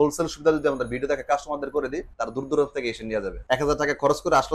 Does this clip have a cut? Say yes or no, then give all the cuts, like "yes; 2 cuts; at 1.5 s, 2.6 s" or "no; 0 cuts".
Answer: yes; 2 cuts; at 2.1 s, 3.3 s